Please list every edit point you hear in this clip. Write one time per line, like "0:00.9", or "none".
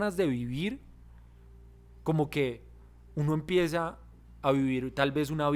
none